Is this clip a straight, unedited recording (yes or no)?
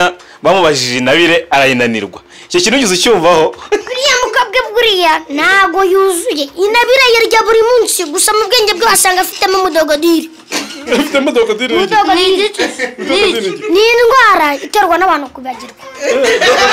yes